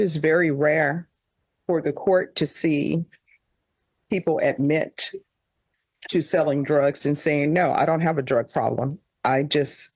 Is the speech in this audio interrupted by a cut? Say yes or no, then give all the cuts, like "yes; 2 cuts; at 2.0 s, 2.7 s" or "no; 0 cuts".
no; 0 cuts